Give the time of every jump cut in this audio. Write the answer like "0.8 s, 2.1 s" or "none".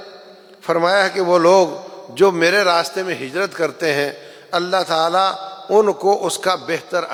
none